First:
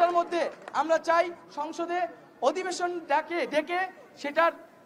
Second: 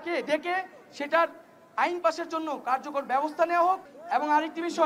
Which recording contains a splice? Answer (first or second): second